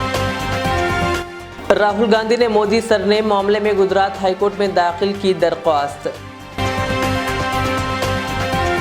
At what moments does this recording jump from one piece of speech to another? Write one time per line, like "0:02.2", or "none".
0:01.0